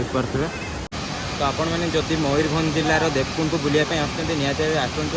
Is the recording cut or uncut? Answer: cut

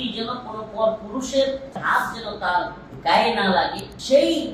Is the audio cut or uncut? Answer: cut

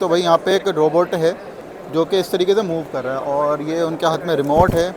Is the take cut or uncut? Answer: uncut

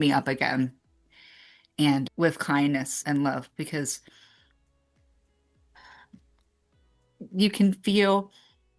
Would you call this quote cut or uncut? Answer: uncut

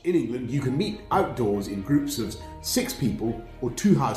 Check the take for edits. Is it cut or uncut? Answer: uncut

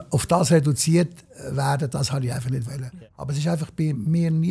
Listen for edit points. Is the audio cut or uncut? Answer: cut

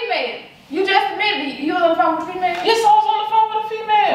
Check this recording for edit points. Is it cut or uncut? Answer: uncut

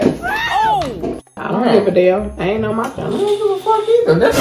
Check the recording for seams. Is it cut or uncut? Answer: cut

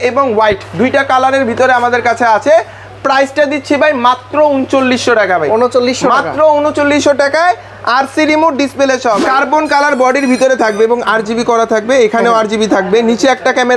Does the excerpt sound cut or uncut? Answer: cut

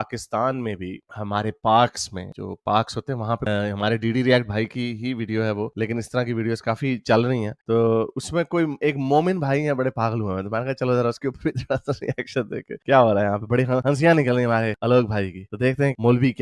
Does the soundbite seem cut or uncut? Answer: cut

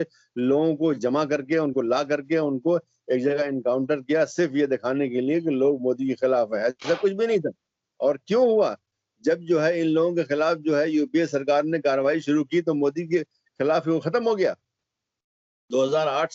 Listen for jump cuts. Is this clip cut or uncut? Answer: uncut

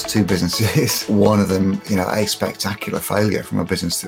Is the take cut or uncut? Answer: cut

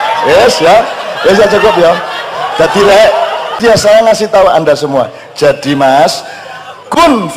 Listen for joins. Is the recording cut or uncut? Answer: cut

